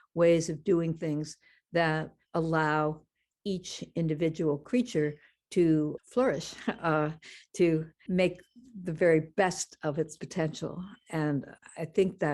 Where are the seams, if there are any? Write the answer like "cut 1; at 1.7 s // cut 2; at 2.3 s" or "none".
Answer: cut 1; at 2.2 s // cut 2; at 6.0 s // cut 3; at 8.0 s // cut 4; at 11.5 s